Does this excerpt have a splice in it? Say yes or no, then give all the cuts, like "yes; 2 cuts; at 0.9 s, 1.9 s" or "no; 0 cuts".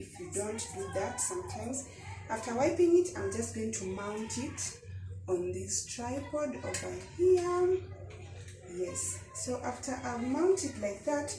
no; 0 cuts